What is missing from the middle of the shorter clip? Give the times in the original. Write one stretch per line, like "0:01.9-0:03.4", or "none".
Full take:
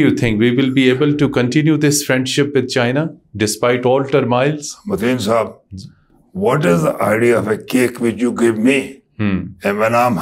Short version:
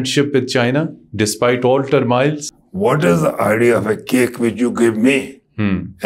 0:04.7-0:06.1